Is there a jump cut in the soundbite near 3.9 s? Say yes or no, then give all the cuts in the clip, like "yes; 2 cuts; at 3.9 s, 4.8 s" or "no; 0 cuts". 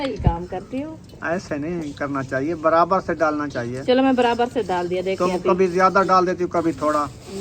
no; 0 cuts